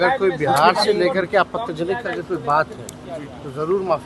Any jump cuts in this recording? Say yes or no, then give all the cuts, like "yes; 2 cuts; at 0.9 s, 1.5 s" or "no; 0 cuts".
no; 0 cuts